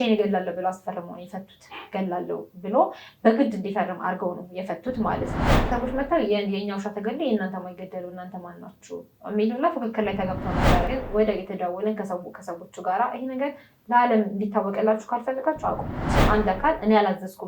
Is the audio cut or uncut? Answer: cut